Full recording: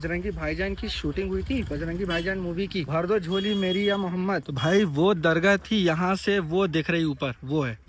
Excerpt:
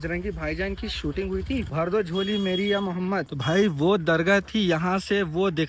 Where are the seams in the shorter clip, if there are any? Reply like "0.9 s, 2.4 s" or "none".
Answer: 1.7 s